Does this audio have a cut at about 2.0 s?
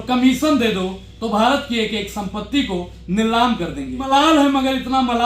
no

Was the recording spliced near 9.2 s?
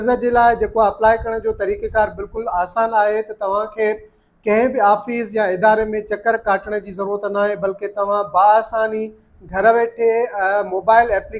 no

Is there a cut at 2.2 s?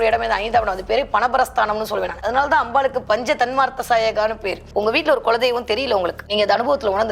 yes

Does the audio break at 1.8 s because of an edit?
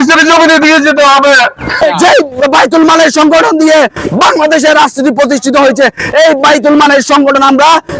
yes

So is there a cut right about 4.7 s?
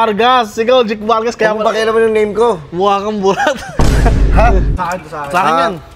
yes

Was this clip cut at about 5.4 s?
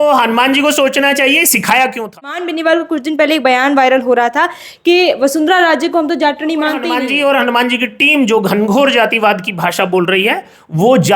no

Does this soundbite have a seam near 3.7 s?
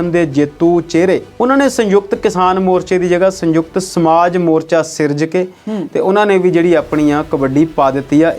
no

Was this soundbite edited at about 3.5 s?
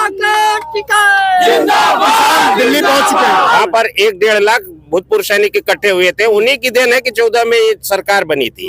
yes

